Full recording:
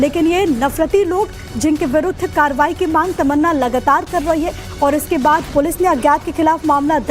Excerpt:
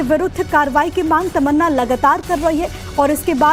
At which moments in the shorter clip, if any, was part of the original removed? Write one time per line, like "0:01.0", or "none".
none